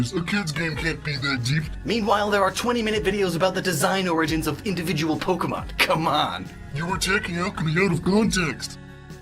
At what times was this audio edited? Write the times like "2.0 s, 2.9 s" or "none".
6.2 s